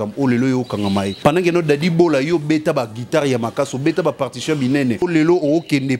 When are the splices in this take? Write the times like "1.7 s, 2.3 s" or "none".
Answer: 1.1 s, 5.0 s

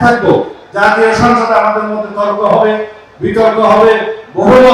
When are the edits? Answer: none

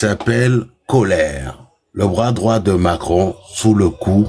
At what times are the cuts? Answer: none

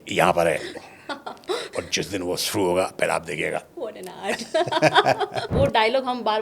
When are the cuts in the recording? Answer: 1.7 s, 5.5 s

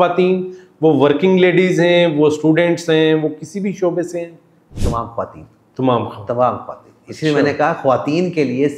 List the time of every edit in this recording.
none

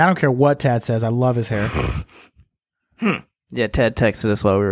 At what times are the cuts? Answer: 1.7 s

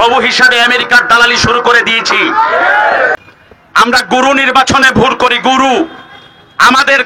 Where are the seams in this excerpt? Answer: 3.2 s

